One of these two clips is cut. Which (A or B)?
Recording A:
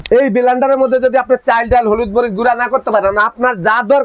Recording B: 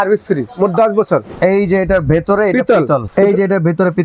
B